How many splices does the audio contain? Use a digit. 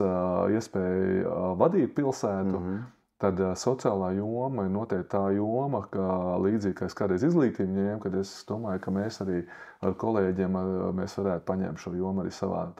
0